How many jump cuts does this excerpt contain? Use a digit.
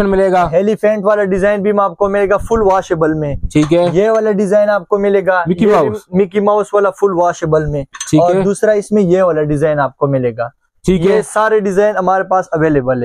0